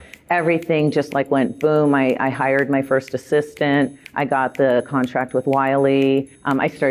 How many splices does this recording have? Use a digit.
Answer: 0